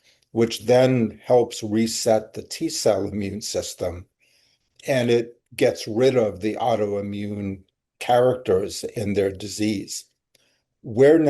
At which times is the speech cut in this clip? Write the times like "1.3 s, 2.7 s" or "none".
9.0 s